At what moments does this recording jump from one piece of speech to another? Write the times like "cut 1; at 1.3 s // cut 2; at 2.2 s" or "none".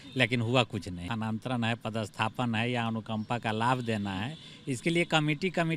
cut 1; at 1.0 s

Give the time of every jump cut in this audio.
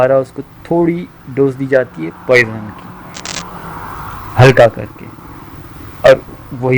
none

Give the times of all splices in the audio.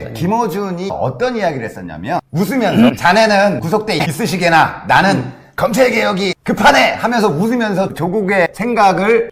none

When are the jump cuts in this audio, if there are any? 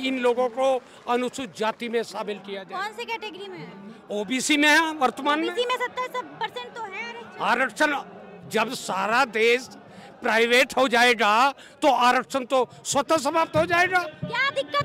none

